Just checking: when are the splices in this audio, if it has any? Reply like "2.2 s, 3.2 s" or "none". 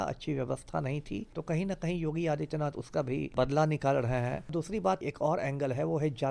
1.3 s, 3.3 s, 5.0 s